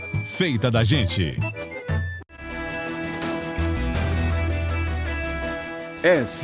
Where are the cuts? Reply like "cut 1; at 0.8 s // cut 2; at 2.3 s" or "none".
cut 1; at 2.5 s